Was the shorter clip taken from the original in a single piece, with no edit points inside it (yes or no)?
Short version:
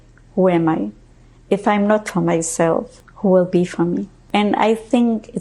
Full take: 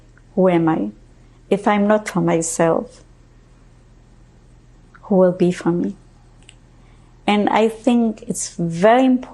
no